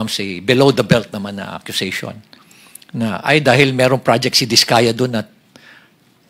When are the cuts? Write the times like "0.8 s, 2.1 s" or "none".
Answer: none